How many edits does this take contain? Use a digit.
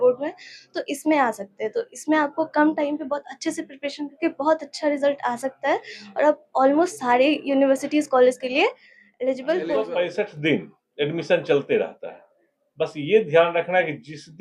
1